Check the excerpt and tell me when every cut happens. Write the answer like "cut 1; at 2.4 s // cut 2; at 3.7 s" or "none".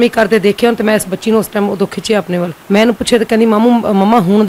cut 1; at 2.6 s